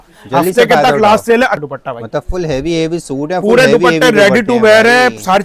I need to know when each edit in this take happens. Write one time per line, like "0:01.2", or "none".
0:01.6